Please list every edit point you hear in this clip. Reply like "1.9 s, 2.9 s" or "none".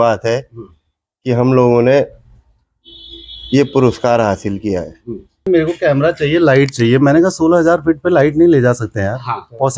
5.5 s

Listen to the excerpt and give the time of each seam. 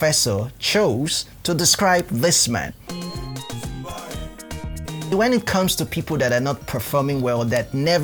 none

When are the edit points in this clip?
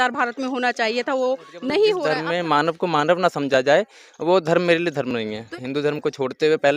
2.1 s, 5.5 s

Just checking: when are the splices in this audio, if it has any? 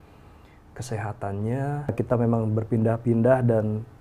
1.9 s

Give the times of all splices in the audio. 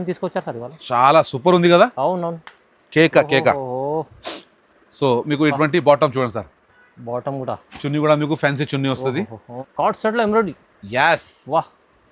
9.6 s

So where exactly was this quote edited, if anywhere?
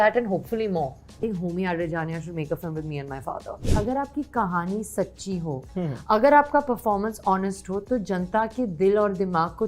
1.2 s, 3.6 s

